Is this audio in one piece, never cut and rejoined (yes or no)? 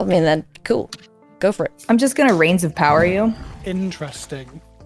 yes